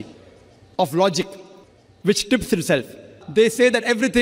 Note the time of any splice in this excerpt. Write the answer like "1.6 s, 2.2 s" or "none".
3.2 s